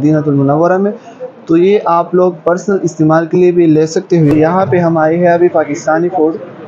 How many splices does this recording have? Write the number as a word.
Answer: one